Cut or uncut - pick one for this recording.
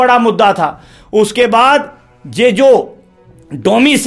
uncut